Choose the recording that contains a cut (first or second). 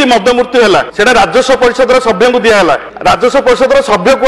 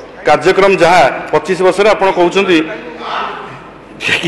first